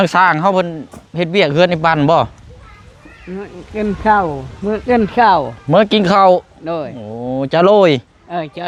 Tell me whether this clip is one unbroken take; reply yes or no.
yes